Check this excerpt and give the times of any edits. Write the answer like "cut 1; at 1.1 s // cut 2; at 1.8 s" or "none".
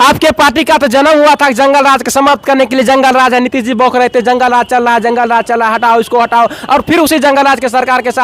none